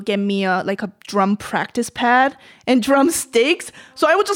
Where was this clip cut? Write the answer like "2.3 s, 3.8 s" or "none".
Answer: none